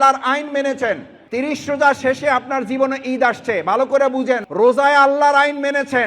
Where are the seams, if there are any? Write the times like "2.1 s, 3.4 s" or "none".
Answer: 1.2 s, 4.4 s